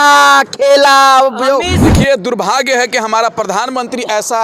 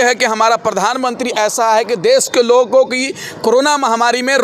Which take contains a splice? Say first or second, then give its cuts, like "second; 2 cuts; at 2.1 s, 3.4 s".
first; 1 cut; at 1.8 s